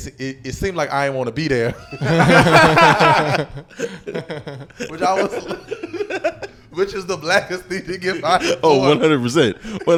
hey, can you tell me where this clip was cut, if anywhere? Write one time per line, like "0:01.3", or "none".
none